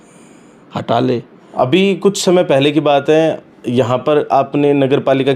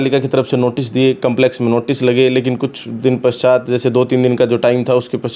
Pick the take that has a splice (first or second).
first